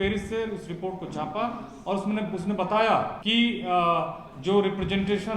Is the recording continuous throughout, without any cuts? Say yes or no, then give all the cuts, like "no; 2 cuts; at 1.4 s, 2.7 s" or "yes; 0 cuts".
no; 1 cut; at 3.2 s